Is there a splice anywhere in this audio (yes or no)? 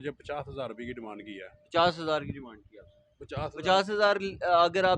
no